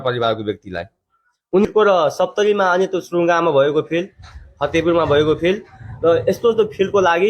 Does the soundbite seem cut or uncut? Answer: cut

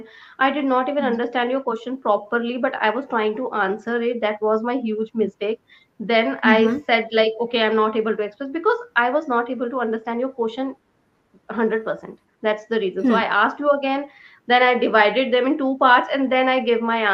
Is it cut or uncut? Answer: uncut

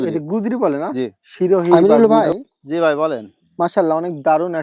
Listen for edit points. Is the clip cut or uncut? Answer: cut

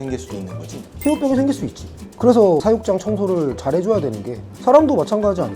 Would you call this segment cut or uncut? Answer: cut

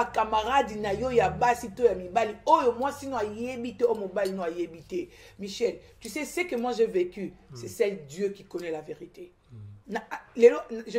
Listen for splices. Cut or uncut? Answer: cut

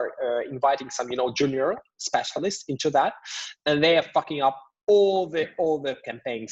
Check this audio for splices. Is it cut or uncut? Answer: uncut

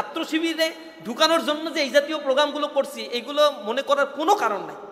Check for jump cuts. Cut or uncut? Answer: uncut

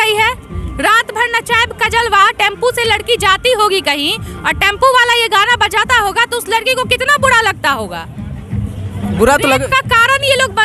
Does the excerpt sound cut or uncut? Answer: uncut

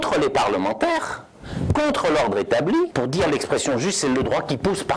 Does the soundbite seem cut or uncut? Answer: cut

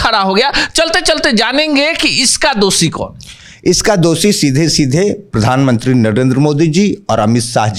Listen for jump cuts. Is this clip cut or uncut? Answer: uncut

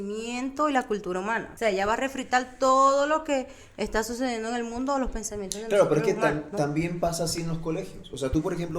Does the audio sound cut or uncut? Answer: cut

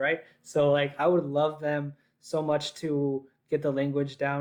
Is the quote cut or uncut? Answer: uncut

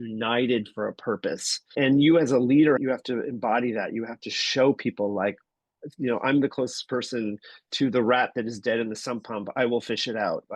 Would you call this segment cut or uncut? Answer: cut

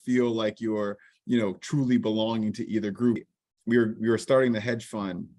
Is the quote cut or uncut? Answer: cut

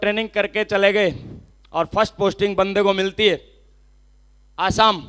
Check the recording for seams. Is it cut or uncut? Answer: uncut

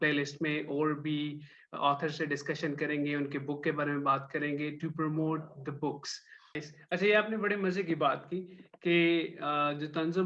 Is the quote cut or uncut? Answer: cut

